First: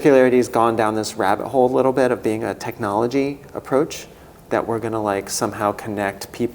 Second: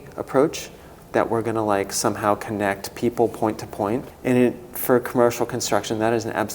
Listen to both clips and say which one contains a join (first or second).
second